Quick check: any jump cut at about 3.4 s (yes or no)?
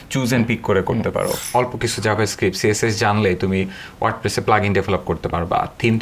no